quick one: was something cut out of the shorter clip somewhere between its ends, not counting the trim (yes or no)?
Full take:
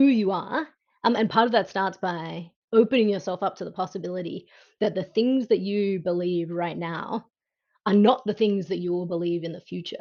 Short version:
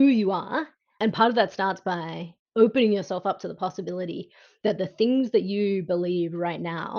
yes